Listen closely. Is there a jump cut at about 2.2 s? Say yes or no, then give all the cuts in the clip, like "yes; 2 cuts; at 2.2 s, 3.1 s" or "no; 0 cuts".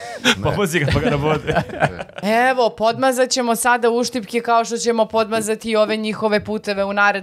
yes; 1 cut; at 2.2 s